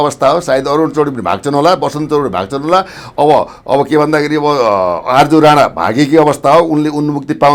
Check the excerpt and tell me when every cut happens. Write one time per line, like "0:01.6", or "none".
none